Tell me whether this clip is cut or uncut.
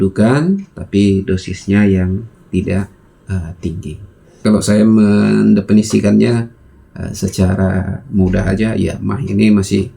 cut